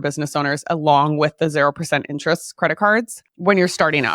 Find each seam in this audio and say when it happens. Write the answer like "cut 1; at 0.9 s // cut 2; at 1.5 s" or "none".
cut 1; at 3.2 s